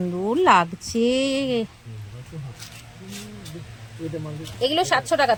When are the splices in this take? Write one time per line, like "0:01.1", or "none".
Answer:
none